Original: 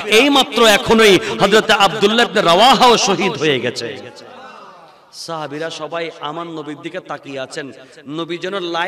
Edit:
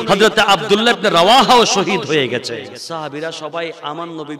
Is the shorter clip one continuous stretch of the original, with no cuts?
no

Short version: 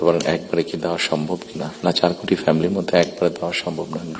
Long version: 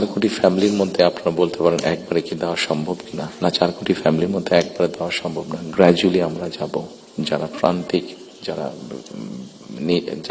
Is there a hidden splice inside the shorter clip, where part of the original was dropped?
no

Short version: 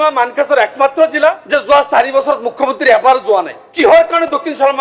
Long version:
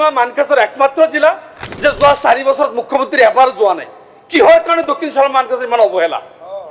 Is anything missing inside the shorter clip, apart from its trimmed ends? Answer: yes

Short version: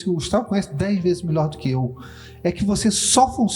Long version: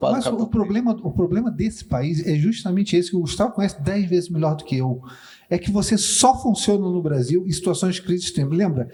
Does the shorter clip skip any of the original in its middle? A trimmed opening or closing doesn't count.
no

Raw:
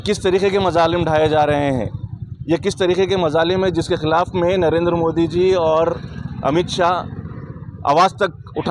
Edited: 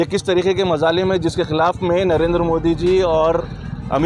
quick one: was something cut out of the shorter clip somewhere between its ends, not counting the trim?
no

